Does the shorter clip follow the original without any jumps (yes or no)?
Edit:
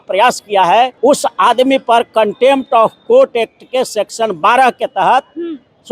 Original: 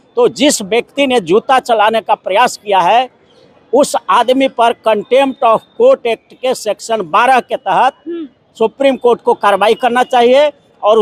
no